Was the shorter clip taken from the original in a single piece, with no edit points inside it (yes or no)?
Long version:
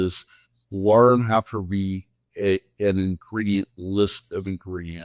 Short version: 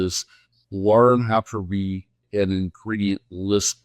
no